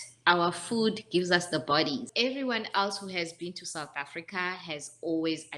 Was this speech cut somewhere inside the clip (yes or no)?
yes